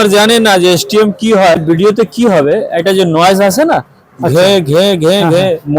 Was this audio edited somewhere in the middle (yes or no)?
yes